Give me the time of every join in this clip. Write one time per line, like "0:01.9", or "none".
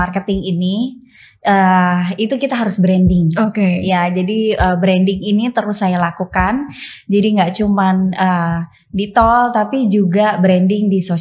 none